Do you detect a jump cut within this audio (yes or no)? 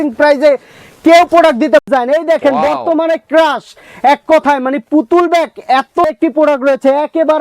yes